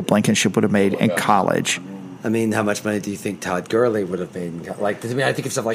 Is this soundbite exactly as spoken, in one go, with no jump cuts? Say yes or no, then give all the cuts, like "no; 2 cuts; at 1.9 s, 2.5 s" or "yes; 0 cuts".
no; 1 cut; at 1.8 s